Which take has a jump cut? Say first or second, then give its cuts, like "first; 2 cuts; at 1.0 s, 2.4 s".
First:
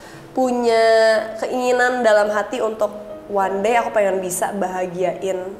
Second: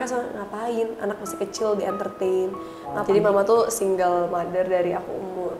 second; 1 cut; at 3.0 s